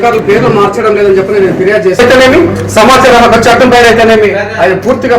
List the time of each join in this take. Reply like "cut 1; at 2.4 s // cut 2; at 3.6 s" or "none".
cut 1; at 1.2 s